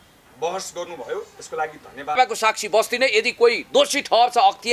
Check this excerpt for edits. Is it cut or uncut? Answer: cut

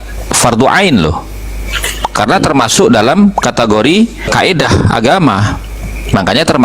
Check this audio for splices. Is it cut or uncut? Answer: cut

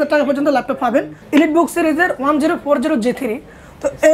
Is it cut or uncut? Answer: cut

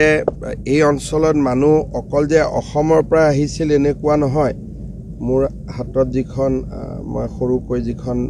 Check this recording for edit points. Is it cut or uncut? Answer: uncut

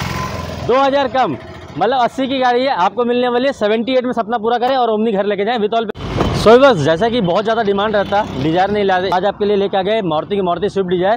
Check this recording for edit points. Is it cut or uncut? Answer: cut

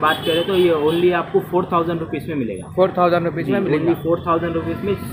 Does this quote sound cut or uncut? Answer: uncut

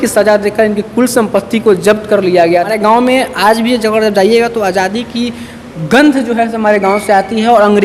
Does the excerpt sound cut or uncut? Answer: cut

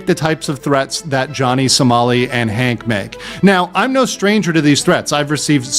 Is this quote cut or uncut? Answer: uncut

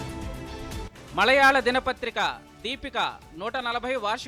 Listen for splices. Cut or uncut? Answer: uncut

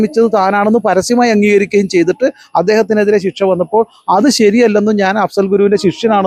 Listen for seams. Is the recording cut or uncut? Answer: uncut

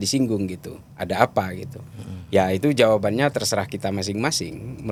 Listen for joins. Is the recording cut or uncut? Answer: uncut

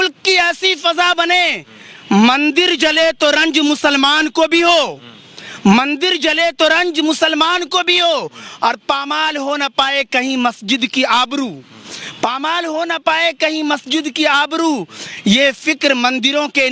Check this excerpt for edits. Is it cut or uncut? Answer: uncut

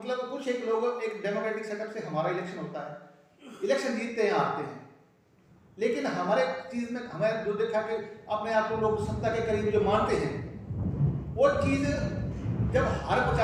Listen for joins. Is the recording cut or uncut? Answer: uncut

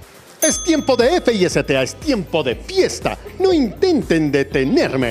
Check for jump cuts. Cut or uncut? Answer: uncut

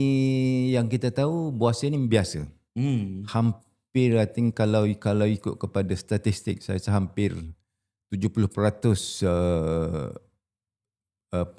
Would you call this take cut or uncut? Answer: uncut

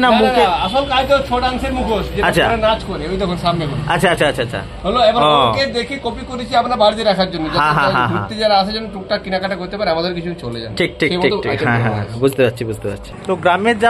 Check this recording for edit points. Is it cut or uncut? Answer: uncut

